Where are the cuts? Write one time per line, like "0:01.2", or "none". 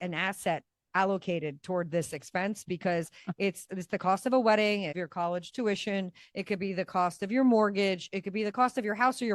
none